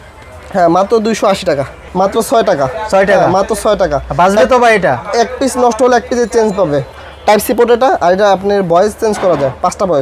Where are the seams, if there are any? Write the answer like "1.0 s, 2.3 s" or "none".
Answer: 1.8 s, 6.9 s